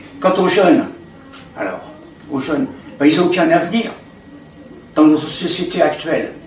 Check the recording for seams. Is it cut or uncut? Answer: uncut